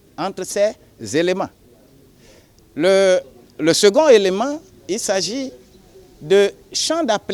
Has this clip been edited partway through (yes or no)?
no